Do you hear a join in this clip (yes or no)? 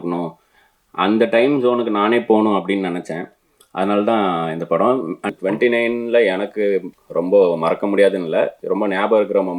yes